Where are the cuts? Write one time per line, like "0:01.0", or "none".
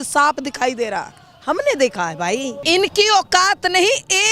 0:02.6